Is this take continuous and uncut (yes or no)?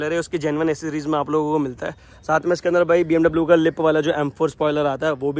yes